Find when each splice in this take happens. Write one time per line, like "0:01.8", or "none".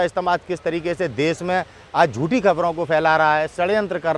none